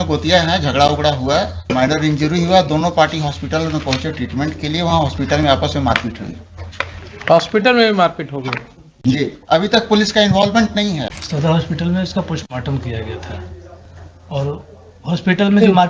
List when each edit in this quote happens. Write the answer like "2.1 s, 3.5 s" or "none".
1.6 s, 11.1 s